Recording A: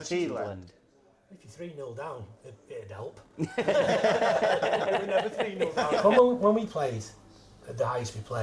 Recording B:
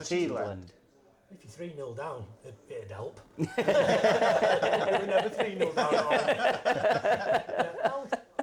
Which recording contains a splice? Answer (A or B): A